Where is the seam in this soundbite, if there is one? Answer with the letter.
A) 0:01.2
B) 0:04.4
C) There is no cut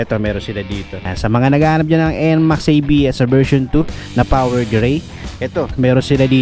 A